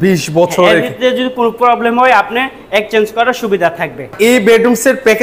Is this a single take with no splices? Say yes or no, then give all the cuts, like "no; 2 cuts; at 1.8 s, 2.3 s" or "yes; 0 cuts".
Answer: no; 1 cut; at 4.1 s